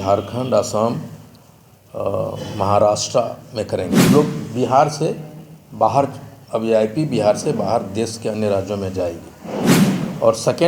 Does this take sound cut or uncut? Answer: cut